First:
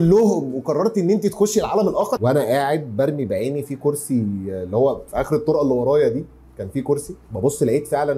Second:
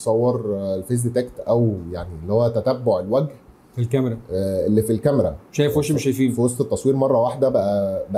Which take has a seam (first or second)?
first